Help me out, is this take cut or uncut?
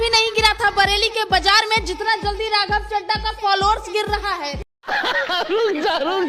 cut